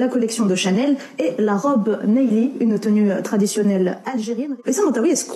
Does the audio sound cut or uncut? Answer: cut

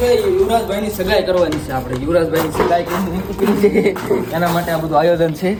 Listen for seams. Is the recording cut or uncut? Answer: uncut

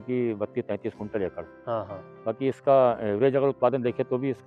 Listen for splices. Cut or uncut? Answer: uncut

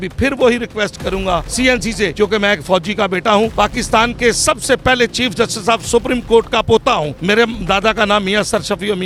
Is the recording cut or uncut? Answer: uncut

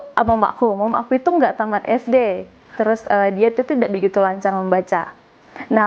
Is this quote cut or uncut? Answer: cut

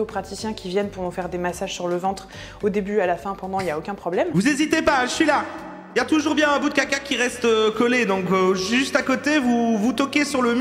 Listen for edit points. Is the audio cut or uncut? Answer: uncut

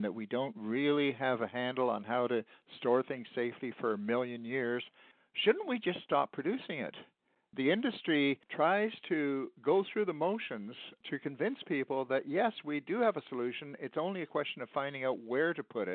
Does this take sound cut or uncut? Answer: cut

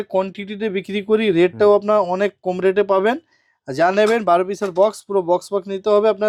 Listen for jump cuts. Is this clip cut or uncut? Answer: uncut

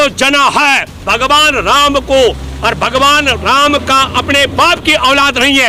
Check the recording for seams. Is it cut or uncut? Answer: cut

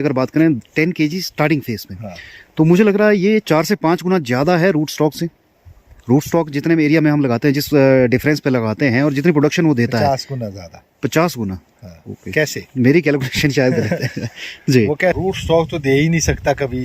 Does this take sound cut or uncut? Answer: cut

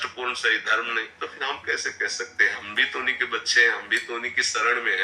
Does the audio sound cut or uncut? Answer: cut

